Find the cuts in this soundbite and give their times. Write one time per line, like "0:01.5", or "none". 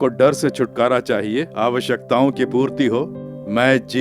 0:01.5